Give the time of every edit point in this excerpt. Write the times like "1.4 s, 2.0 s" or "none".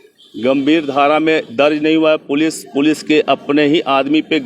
none